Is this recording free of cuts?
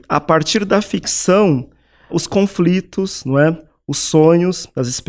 no; 1 cut; at 2.1 s

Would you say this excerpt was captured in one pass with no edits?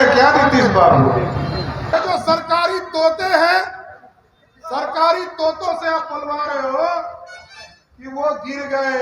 no; 2 cuts; at 1.9 s, 3.2 s

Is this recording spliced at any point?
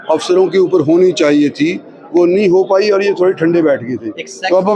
no; 0 cuts

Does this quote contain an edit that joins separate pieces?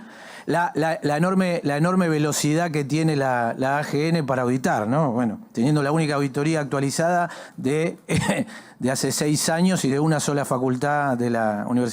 no; 0 cuts

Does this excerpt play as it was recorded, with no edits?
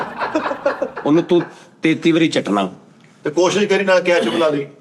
yes; 0 cuts

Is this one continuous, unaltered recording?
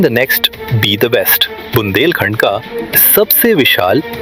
yes; 0 cuts

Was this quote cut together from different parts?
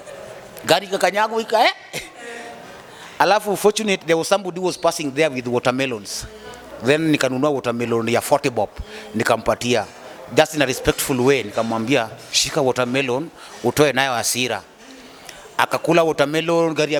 no; 0 cuts

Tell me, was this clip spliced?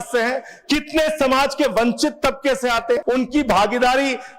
yes; 1 cut; at 3.0 s

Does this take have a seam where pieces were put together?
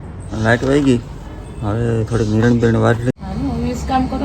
yes; 1 cut; at 3.1 s

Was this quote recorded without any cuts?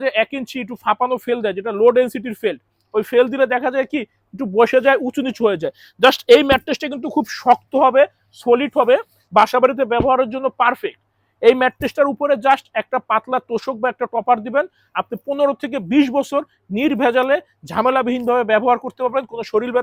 yes; 0 cuts

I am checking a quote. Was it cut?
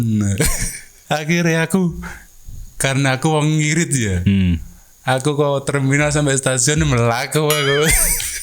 yes; 1 cut; at 0.9 s

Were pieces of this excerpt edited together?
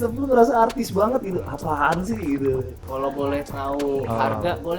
yes; 1 cut; at 2.8 s

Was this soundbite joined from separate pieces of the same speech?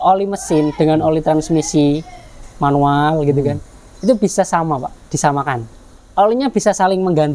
yes; 1 cut; at 6.0 s

